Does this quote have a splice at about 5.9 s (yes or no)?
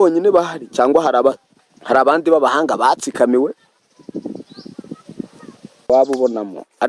yes